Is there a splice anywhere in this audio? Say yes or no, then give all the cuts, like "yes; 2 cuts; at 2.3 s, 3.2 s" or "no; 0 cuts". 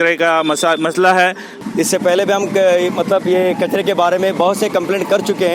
yes; 1 cut; at 1.5 s